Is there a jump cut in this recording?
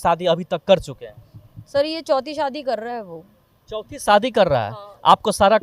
no; 0 cuts

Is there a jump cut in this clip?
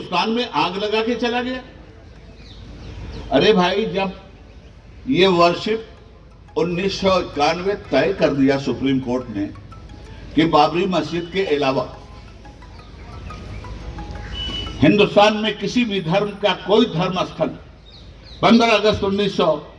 no; 0 cuts

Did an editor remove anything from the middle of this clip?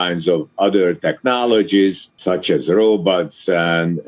yes; 1 cut; at 2.1 s

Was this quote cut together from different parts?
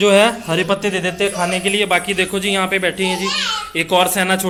no; 0 cuts

